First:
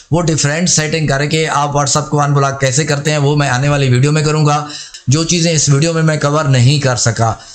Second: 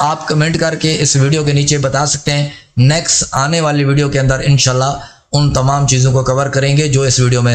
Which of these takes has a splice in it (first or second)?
first